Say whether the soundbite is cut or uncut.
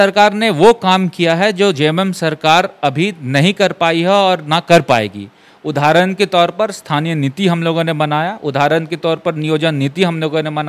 uncut